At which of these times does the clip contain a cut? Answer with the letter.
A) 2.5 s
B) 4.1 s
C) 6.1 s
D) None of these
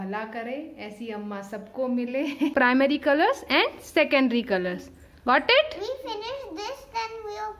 A